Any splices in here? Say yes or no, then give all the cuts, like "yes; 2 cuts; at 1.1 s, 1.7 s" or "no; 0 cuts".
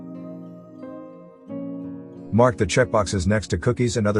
yes; 1 cut; at 2.3 s